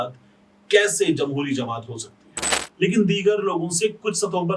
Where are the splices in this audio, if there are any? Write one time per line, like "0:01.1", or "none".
0:02.6